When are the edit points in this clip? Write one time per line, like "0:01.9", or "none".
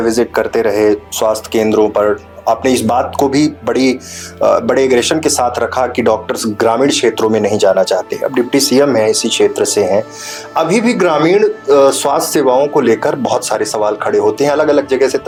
none